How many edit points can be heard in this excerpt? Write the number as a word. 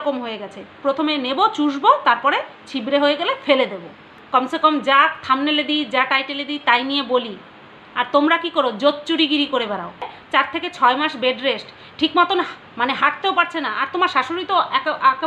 two